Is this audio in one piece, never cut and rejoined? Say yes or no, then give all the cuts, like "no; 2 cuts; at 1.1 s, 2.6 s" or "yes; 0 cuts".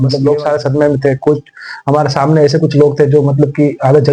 yes; 0 cuts